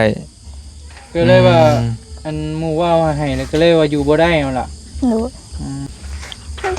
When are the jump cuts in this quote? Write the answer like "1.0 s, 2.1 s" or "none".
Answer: 5.8 s